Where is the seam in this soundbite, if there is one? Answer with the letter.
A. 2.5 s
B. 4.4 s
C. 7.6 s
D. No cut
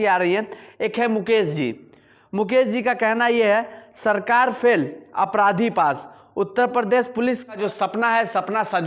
C